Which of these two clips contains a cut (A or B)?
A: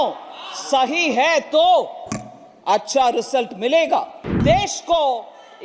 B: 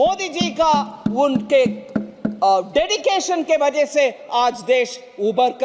A